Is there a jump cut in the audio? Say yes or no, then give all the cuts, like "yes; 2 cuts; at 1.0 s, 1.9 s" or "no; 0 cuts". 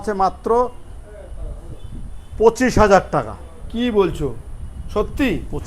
no; 0 cuts